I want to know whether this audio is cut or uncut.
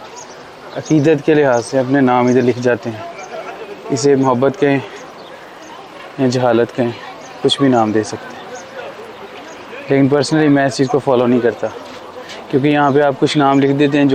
uncut